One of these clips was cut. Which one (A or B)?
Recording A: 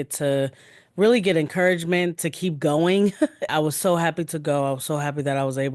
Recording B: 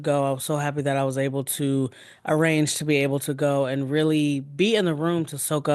A